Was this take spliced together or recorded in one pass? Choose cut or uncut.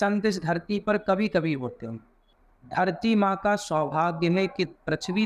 cut